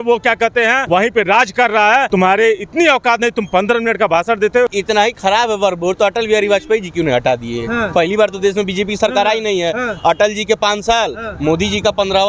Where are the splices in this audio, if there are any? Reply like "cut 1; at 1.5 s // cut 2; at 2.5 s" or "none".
cut 1; at 0.8 s // cut 2; at 2.1 s // cut 3; at 4.8 s